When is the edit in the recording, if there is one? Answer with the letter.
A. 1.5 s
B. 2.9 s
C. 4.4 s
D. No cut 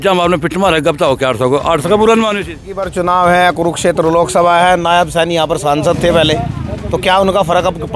B